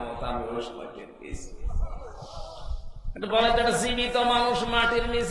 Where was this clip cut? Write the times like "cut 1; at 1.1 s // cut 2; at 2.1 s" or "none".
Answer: none